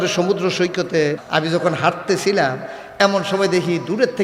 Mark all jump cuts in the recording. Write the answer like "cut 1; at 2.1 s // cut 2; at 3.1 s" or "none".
cut 1; at 1.2 s